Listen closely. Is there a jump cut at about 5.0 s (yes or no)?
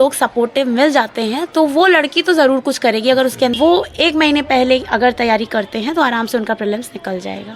no